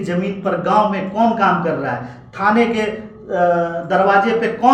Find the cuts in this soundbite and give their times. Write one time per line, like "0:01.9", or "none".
none